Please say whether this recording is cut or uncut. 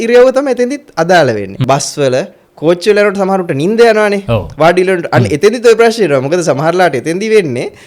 cut